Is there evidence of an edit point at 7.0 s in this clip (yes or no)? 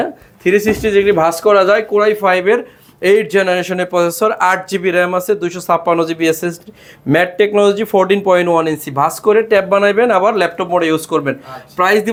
no